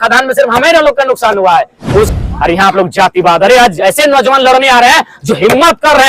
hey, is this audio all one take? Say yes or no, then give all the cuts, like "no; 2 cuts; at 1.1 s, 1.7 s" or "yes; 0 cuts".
no; 1 cut; at 2.1 s